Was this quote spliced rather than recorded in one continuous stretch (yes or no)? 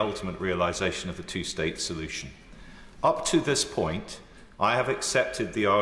no